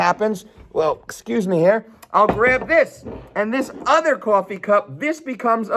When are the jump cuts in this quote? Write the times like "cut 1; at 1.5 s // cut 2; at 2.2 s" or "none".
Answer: none